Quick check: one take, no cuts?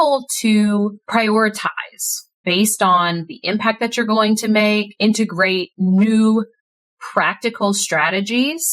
no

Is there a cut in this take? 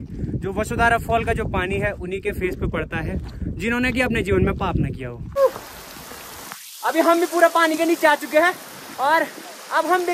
yes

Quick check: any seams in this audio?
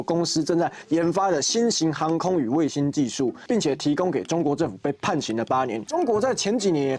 yes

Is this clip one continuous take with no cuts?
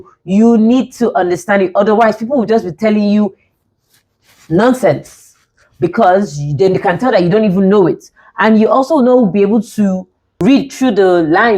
yes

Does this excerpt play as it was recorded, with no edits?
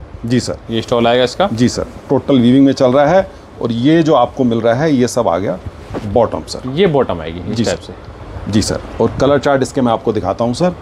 yes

